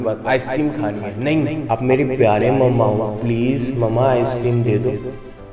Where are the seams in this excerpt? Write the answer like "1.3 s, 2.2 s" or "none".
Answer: 1.7 s